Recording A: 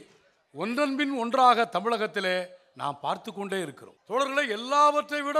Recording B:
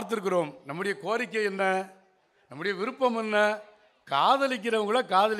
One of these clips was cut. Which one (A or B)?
A